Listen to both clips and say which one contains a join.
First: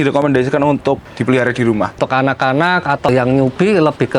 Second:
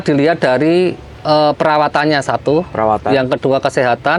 first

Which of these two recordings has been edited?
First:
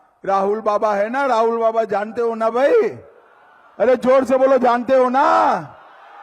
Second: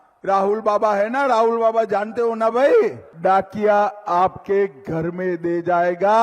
second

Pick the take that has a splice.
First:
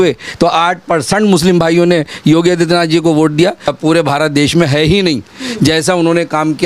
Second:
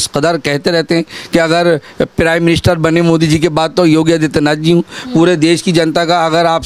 first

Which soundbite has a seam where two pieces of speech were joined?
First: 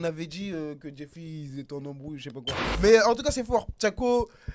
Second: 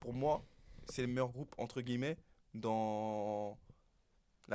first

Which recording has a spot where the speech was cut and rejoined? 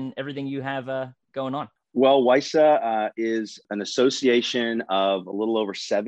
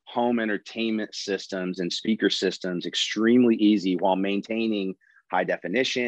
first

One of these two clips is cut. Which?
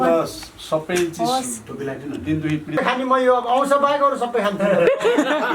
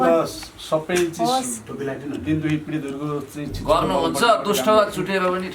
first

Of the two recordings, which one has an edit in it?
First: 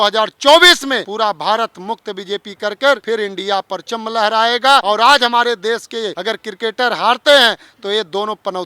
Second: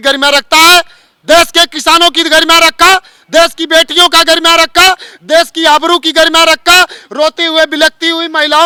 first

